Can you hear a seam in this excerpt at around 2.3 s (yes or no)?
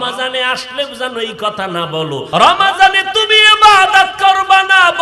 yes